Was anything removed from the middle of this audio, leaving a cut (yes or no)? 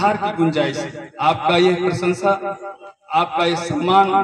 no